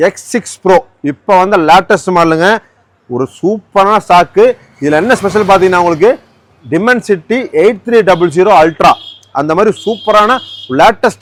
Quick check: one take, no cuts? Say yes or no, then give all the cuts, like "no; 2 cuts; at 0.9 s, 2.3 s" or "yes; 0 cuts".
yes; 0 cuts